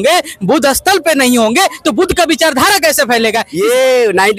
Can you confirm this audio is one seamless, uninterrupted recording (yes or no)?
no